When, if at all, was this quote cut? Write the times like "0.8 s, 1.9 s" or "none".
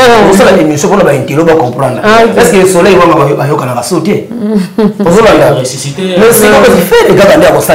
none